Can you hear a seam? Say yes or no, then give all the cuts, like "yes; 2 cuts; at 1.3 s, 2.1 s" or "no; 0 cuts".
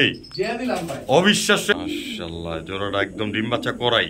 yes; 1 cut; at 1.7 s